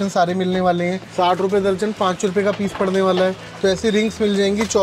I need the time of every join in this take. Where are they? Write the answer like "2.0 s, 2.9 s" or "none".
1.0 s, 3.5 s